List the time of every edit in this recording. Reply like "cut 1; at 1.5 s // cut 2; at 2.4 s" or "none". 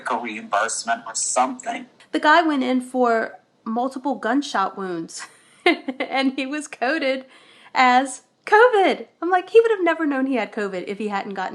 cut 1; at 1.9 s